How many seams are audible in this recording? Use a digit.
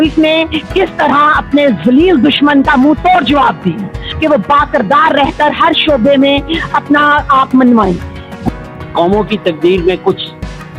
2